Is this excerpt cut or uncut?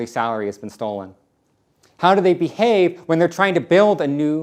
uncut